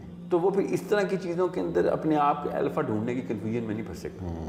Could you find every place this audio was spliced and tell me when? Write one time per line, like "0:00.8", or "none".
none